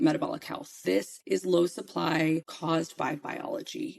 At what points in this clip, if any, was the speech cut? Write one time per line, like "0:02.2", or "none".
0:00.9
0:02.5